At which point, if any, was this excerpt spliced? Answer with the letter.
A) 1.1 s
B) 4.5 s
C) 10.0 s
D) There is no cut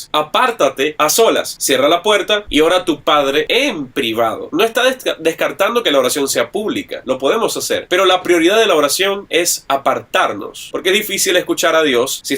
B